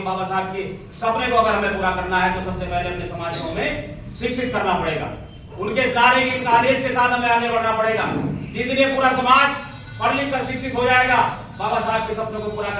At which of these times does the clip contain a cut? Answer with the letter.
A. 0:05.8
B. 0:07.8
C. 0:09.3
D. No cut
D